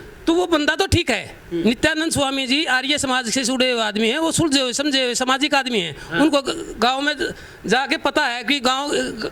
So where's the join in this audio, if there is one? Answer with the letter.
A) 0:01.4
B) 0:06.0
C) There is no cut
C